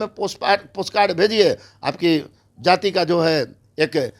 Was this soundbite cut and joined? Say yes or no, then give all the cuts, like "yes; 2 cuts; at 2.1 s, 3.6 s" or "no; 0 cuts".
no; 0 cuts